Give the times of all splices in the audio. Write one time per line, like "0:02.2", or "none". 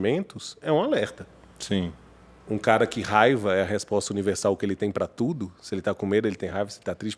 none